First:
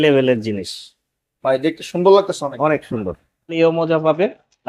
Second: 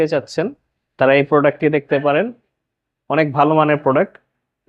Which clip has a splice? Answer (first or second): first